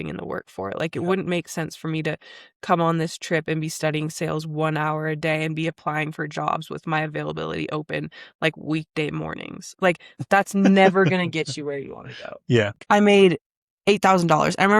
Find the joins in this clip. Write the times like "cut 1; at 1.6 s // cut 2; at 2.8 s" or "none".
cut 1; at 12.8 s